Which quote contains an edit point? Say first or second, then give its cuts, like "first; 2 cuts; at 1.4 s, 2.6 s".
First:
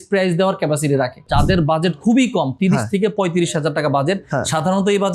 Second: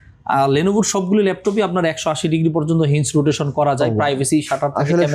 first; 1 cut; at 1.2 s